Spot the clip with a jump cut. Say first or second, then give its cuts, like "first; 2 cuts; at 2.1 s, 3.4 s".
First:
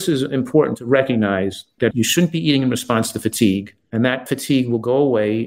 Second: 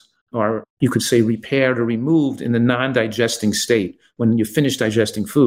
first; 2 cuts; at 1.6 s, 3.8 s